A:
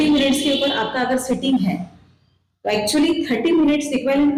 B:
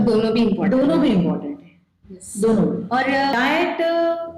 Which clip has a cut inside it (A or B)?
B